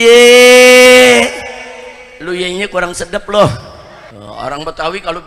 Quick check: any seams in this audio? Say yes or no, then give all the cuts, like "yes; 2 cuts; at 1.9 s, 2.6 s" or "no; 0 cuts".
yes; 1 cut; at 4.0 s